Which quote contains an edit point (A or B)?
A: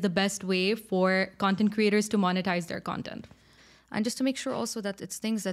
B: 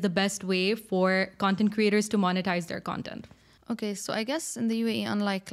A